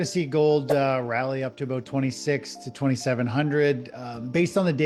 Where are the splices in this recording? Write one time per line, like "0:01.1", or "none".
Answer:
none